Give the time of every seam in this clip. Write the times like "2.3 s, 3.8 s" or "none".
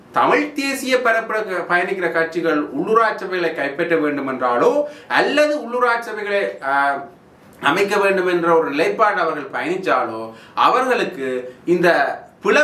none

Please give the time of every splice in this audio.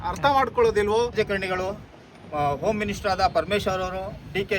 1.1 s

